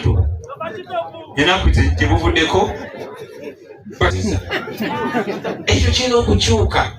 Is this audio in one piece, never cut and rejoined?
no; 1 cut; at 4.1 s

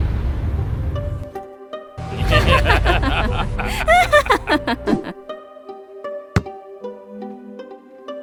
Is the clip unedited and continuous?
yes; 0 cuts

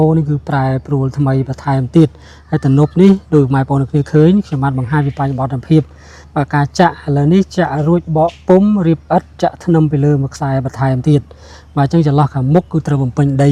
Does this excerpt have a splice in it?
no; 0 cuts

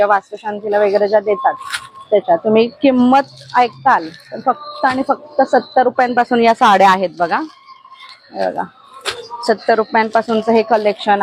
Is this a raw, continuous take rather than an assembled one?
yes; 0 cuts

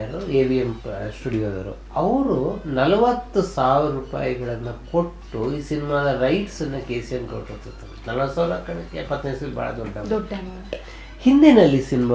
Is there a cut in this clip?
yes; 1 cut; at 1.7 s

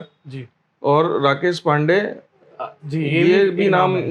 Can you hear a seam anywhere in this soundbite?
no; 0 cuts

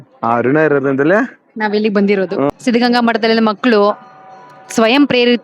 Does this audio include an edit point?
yes; 1 cut; at 2.5 s

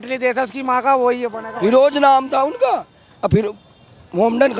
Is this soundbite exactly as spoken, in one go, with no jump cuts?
no; 1 cut; at 1.4 s

